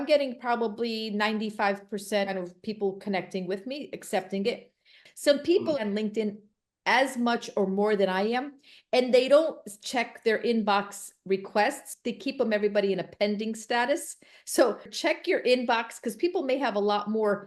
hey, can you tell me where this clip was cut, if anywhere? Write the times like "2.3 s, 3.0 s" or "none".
2.3 s, 5.0 s, 11.9 s, 14.9 s